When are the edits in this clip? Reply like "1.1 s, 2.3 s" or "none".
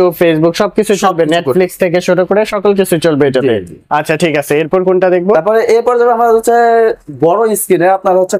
none